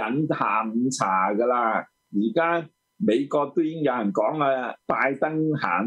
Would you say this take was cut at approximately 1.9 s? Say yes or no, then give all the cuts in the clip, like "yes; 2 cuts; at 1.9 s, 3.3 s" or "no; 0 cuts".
yes; 2 cuts; at 1.9 s, 4.8 s